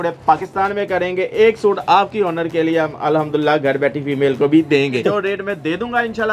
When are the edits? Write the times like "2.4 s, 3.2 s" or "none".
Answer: 5.0 s